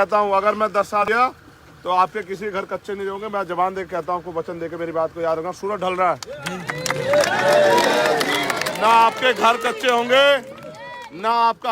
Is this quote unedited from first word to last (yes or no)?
no